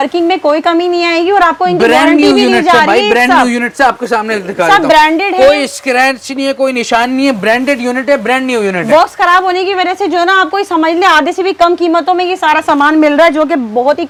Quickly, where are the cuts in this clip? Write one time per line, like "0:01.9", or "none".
none